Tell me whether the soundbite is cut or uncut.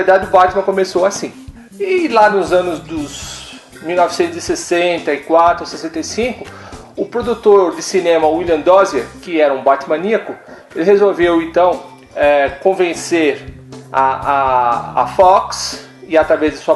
uncut